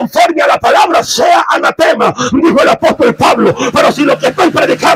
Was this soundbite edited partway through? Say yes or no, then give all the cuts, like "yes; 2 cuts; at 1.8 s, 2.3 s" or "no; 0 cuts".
no; 0 cuts